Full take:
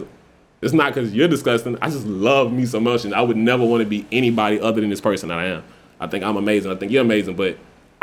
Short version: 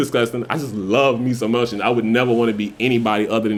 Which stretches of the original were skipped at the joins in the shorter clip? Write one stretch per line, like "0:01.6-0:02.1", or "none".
none

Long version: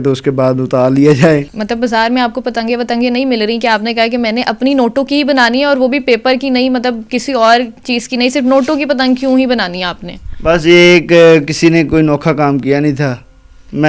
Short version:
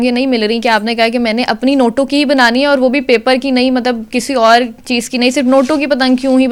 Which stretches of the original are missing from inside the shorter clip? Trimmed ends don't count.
none

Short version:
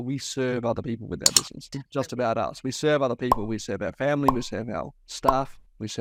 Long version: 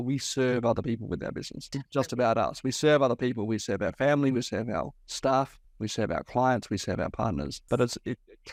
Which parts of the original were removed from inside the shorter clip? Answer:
none

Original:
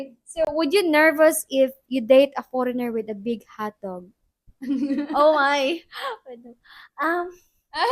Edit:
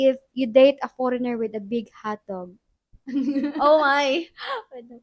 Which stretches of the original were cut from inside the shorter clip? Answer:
none

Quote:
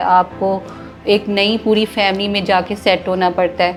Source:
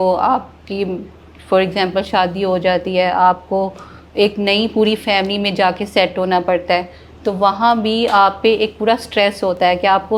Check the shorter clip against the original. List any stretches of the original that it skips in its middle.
none

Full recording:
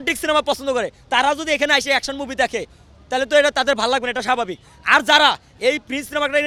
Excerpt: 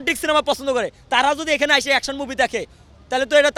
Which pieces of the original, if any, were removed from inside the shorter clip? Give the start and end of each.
none

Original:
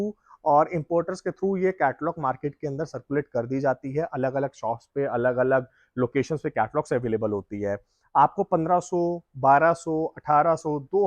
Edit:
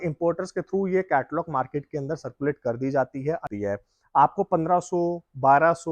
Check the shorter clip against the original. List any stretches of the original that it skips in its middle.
0:04.1-0:07.4

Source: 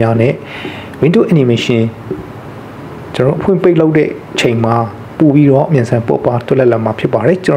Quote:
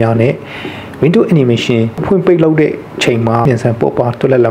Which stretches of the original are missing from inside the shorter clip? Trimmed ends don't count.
0:02.0-0:03.4
0:04.8-0:05.7

